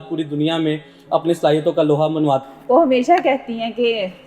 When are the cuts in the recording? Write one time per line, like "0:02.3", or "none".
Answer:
0:02.5